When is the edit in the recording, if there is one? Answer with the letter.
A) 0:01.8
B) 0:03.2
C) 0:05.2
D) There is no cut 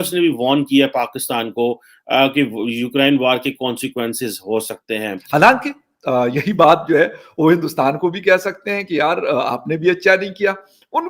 C